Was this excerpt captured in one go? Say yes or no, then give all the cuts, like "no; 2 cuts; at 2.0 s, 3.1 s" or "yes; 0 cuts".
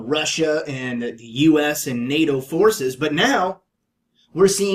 no; 1 cut; at 3.2 s